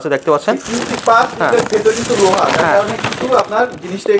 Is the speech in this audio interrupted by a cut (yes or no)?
no